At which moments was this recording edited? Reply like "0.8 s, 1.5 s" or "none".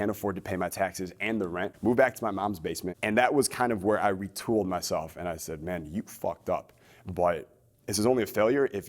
1.7 s, 2.9 s